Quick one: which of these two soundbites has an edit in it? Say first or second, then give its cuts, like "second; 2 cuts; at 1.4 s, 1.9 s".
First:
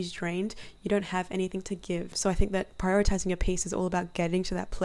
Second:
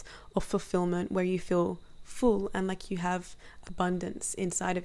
first; 1 cut; at 2.1 s